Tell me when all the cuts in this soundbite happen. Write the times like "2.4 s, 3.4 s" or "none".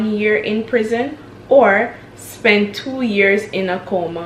none